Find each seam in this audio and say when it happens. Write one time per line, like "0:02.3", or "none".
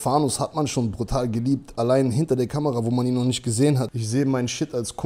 0:03.9